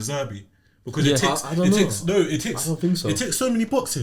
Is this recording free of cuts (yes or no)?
yes